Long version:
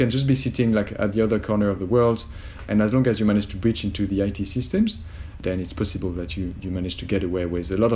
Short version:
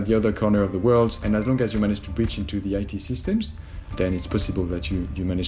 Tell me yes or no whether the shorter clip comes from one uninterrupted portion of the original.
no